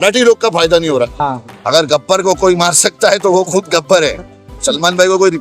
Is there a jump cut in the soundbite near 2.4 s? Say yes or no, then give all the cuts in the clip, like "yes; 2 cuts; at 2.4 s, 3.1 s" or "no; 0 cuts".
no; 2 cuts; at 1.1 s, 4.5 s